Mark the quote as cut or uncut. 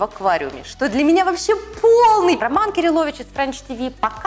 cut